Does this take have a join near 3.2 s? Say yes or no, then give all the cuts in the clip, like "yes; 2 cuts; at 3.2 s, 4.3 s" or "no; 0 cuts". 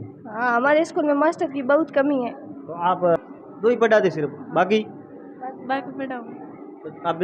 yes; 1 cut; at 3.2 s